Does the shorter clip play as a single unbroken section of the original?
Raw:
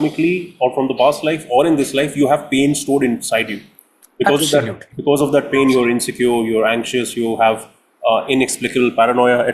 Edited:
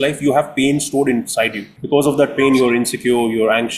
no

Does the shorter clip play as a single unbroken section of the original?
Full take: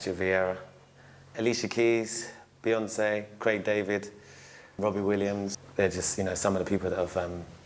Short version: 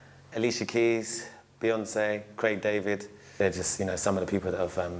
no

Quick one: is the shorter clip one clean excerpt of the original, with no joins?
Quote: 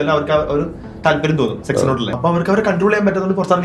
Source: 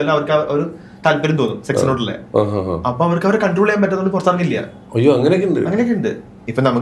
no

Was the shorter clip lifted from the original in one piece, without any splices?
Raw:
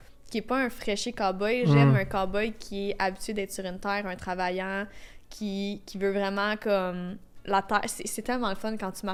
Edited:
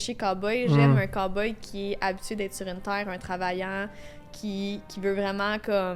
yes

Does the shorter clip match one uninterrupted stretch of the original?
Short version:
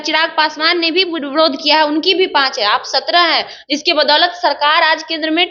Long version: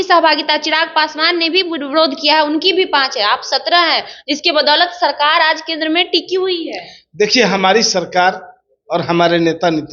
yes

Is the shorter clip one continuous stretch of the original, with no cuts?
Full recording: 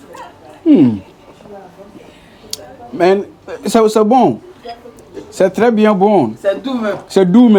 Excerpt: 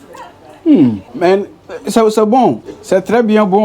no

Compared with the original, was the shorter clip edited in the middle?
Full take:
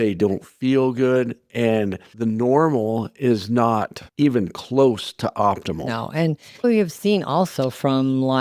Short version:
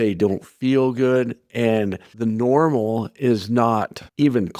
no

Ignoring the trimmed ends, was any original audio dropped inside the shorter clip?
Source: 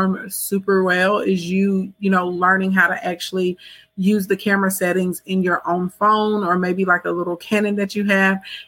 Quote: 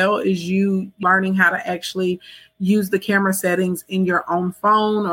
yes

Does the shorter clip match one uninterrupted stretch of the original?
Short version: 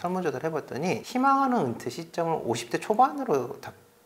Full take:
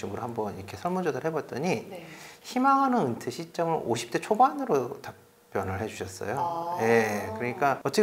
no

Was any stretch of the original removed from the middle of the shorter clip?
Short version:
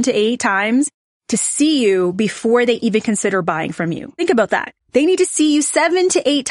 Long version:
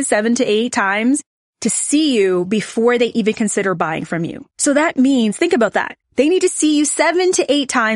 yes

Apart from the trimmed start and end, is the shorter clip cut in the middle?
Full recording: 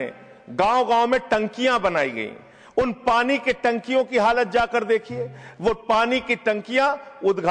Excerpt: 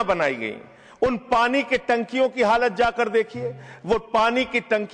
no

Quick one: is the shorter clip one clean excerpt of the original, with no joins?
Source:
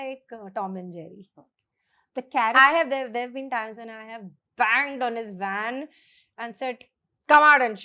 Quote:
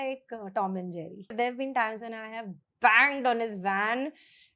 no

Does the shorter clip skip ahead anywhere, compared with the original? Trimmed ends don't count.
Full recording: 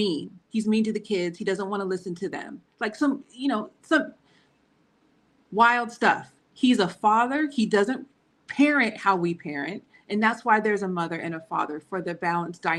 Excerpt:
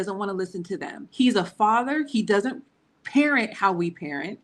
yes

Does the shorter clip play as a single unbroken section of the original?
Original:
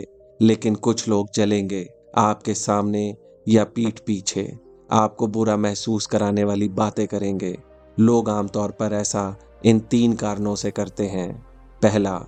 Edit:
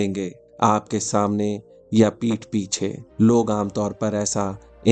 no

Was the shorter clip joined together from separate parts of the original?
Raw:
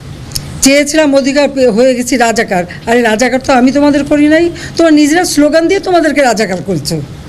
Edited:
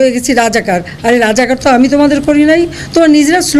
no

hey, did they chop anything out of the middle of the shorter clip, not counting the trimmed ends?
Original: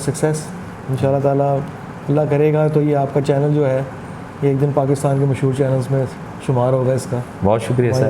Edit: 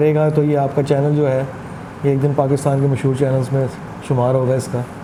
no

